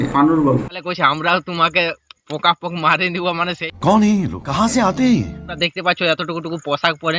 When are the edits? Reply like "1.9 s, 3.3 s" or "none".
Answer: none

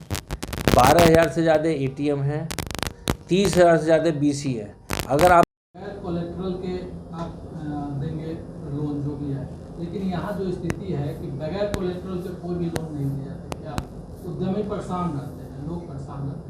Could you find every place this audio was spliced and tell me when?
5.5 s

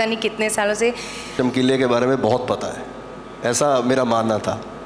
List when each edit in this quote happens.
1.3 s

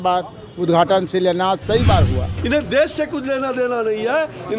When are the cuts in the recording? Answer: 2.3 s

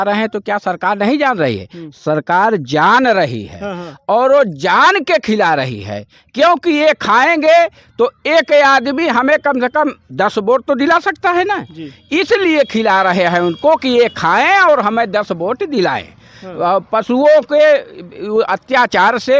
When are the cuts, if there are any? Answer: none

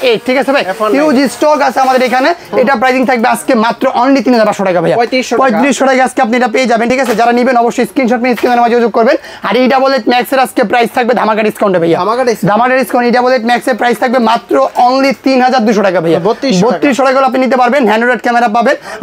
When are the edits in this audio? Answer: none

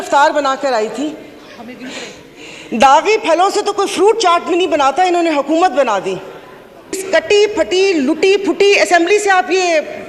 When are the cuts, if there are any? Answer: 7.0 s

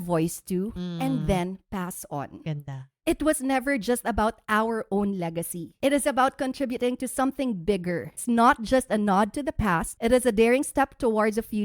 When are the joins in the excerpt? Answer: 2.9 s, 5.7 s, 8.2 s, 9.9 s

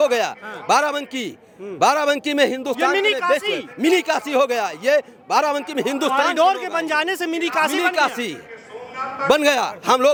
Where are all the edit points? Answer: none

